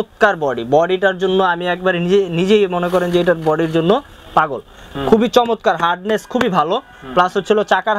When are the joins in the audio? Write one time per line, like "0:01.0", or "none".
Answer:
none